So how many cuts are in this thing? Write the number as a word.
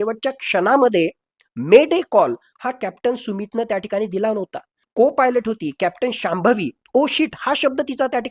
one